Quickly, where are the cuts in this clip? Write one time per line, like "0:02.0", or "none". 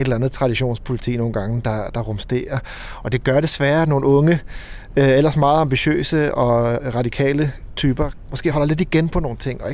0:06.8
0:08.5